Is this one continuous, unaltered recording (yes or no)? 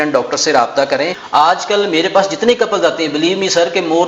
no